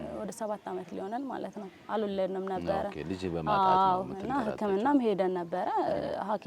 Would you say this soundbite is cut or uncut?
uncut